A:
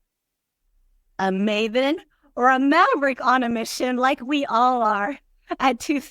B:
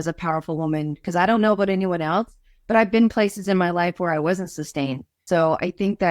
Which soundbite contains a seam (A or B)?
B